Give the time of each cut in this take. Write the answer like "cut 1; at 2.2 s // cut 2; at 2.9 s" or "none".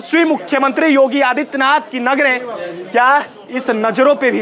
none